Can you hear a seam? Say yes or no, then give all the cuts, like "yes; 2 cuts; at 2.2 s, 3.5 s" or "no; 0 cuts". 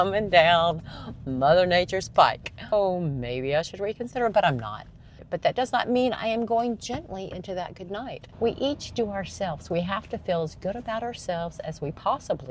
yes; 3 cuts; at 2.7 s, 5.2 s, 8.2 s